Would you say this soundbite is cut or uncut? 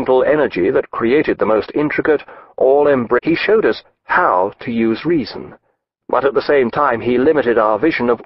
uncut